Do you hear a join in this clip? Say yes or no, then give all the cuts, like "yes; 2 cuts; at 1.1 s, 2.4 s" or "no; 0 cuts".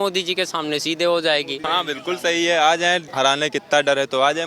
yes; 2 cuts; at 1.5 s, 3.1 s